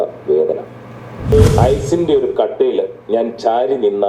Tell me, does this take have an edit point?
yes; 1 cut; at 1.3 s

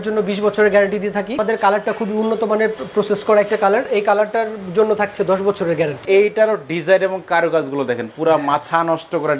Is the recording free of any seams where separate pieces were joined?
no; 3 cuts; at 1.4 s, 3.9 s, 6.0 s

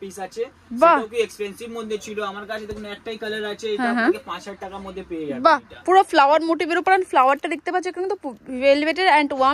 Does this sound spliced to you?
no; 0 cuts

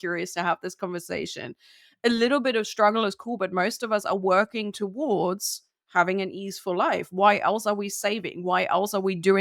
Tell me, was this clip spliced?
no; 0 cuts

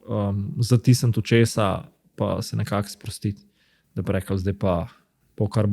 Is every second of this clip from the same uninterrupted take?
yes; 0 cuts

